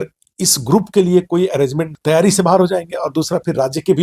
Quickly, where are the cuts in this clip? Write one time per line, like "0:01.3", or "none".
0:01.9

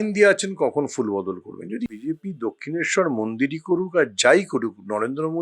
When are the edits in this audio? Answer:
0:02.0

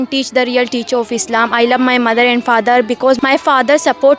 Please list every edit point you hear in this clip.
0:03.2

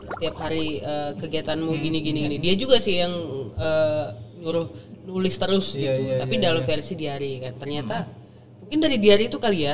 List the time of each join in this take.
none

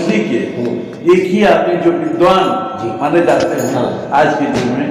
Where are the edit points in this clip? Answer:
none

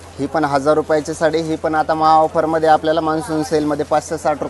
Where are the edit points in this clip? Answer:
none

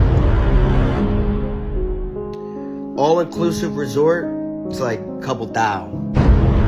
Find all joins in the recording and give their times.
none

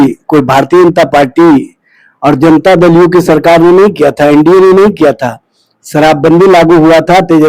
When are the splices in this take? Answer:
none

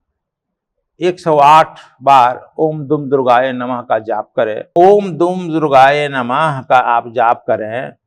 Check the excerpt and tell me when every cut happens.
0:04.7

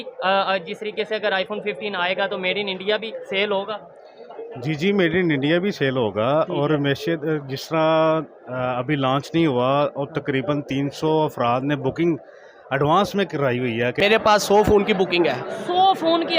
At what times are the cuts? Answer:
0:14.0

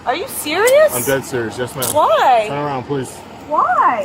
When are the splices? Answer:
0:02.3

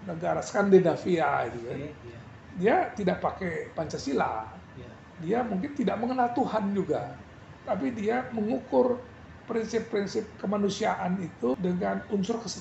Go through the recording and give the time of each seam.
0:11.5

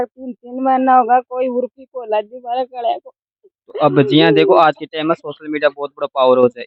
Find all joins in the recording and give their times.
none

